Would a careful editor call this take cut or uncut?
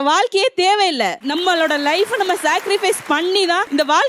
uncut